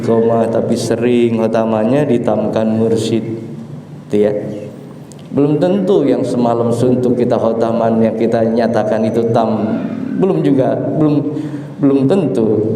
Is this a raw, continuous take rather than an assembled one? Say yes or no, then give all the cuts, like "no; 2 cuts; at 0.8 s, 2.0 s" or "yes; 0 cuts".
yes; 0 cuts